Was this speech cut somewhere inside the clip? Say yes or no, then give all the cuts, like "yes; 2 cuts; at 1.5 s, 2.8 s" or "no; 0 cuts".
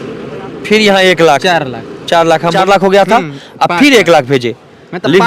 yes; 1 cut; at 2.5 s